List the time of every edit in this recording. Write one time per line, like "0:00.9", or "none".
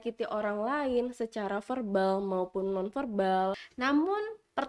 0:03.7